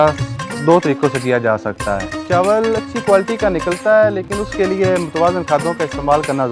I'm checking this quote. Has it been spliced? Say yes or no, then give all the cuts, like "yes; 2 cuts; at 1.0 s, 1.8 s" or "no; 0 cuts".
yes; 1 cut; at 2.1 s